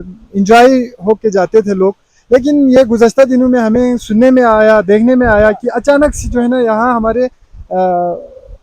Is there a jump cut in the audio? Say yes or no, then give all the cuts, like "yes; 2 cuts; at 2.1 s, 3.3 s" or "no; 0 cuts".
no; 0 cuts